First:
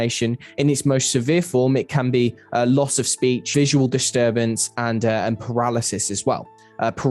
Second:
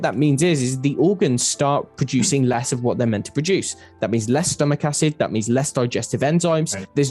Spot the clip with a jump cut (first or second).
first